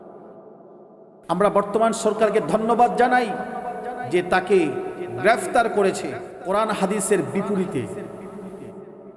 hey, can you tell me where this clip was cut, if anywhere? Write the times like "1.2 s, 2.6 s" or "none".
6.3 s